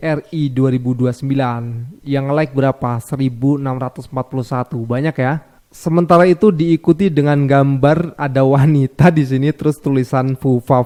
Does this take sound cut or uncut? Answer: uncut